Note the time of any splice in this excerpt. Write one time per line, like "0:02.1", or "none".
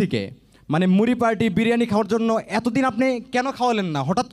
none